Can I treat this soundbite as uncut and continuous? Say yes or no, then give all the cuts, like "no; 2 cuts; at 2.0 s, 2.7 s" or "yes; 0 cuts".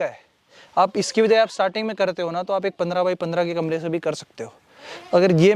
yes; 0 cuts